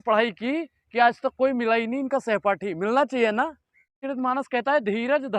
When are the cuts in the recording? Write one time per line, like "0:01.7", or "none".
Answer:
0:04.0